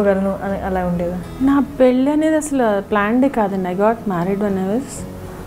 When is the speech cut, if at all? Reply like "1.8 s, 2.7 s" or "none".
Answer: none